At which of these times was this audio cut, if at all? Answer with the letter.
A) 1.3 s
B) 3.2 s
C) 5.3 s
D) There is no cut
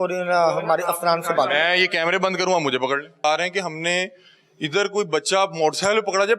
B